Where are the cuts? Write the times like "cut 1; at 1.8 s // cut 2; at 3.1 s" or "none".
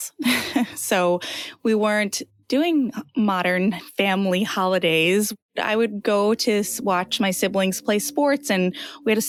none